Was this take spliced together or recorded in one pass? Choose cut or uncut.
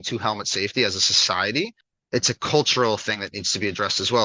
cut